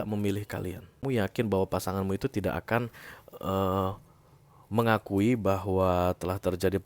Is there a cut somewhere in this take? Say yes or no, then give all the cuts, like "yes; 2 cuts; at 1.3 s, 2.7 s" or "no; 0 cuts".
yes; 1 cut; at 1.0 s